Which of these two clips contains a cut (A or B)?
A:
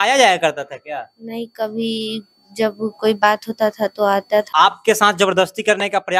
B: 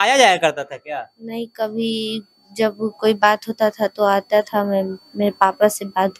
A